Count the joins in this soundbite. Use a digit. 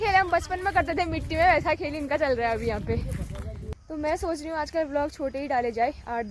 1